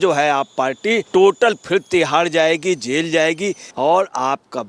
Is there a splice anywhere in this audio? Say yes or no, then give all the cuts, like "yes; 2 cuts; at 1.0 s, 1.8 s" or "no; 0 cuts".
yes; 2 cuts; at 1.0 s, 3.6 s